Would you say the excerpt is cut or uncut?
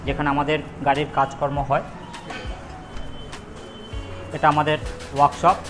uncut